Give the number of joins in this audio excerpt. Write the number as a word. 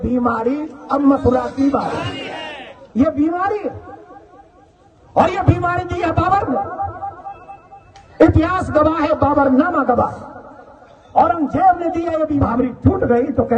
one